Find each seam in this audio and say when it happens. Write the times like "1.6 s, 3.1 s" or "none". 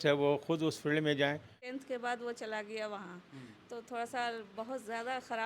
1.6 s